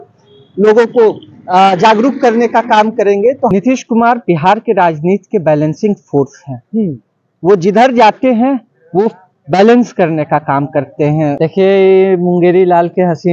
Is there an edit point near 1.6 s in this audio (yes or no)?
no